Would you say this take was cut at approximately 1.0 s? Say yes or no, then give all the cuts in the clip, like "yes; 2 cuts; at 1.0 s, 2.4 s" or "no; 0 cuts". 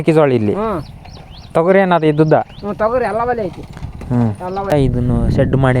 no; 1 cut; at 4.7 s